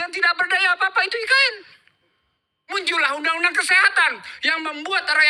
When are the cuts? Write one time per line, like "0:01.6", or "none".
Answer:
none